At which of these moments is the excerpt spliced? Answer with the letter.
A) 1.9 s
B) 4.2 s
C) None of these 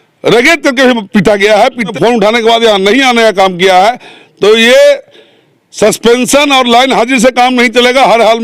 A